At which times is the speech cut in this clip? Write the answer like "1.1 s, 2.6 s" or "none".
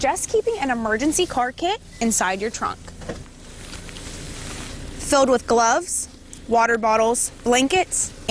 none